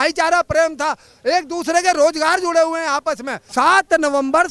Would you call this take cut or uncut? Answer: uncut